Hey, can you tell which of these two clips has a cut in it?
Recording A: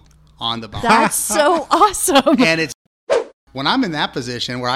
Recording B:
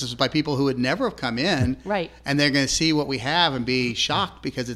A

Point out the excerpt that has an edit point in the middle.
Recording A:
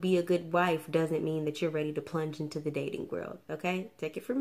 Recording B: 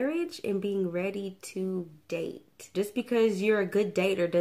B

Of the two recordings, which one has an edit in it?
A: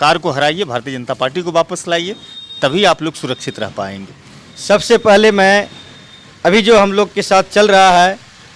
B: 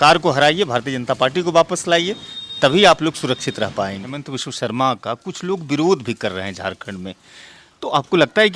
B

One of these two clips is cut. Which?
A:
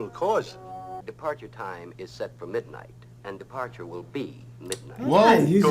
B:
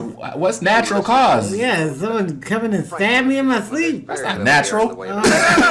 A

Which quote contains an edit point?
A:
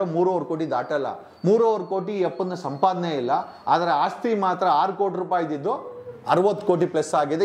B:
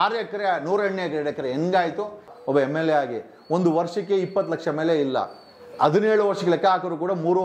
B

